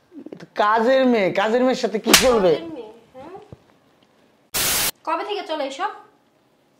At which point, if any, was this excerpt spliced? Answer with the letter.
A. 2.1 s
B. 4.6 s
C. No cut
B